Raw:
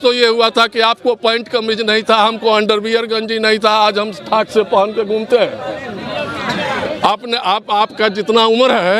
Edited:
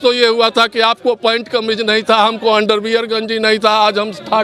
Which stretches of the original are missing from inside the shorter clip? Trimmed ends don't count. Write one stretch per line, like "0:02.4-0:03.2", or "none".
none